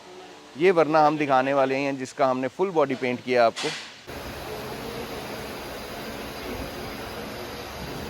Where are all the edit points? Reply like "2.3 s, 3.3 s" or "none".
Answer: 3.9 s